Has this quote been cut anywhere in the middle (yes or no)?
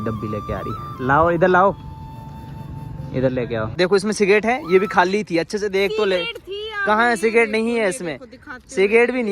yes